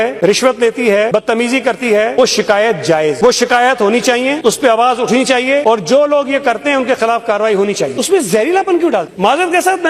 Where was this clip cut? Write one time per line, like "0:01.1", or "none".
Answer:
0:08.0